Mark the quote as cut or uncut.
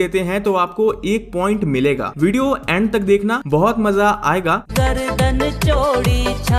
cut